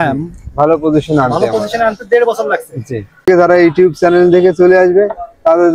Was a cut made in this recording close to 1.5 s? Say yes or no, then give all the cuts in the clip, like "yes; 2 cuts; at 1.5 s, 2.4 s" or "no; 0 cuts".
no; 1 cut; at 3.3 s